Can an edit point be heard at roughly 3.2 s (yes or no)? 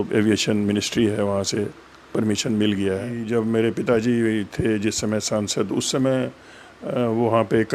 yes